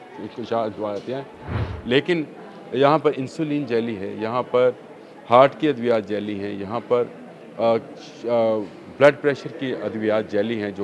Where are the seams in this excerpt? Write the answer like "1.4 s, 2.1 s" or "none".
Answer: none

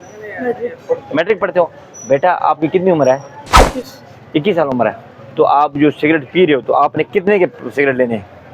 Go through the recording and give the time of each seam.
none

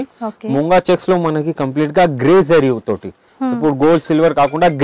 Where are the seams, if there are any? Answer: none

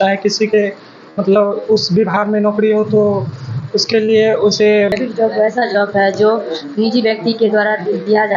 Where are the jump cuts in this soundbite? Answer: 4.9 s

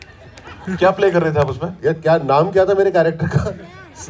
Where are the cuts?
1.7 s

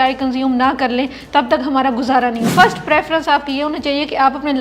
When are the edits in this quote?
2.5 s

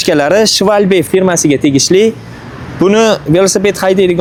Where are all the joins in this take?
none

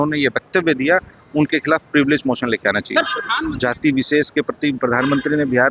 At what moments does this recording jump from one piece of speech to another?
3.4 s

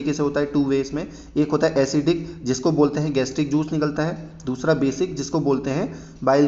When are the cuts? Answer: none

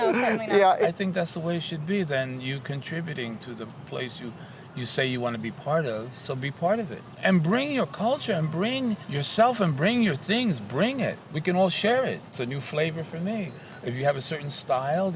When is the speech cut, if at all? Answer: 0.9 s, 7.2 s, 9.1 s, 11.3 s, 12.4 s

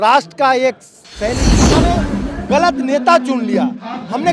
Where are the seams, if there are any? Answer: 1.6 s

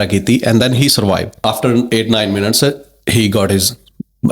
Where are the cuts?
1.4 s

